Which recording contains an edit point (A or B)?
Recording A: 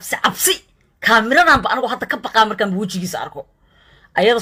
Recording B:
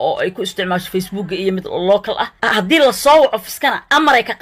B